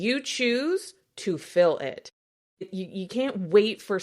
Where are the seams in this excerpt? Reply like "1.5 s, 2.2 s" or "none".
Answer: 2.6 s